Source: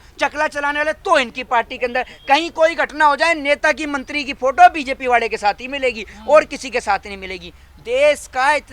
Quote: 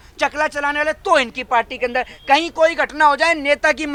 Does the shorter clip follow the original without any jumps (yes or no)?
yes